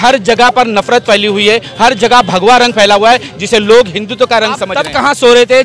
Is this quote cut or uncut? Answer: cut